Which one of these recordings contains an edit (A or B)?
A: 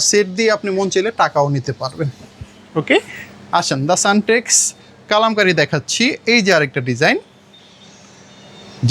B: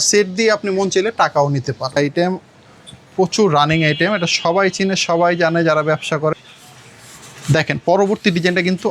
B